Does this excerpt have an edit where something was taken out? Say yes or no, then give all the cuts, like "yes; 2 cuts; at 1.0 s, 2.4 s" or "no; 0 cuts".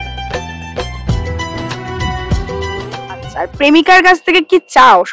no; 0 cuts